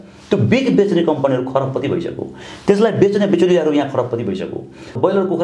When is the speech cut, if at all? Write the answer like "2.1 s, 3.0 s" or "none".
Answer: none